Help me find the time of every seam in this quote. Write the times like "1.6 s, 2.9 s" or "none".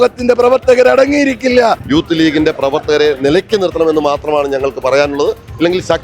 1.8 s